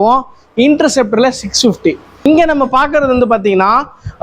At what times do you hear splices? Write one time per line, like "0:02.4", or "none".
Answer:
0:02.2